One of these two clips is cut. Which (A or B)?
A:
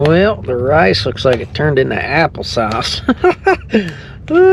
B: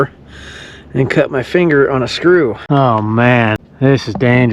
B